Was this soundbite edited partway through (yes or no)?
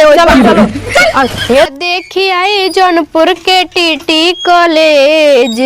yes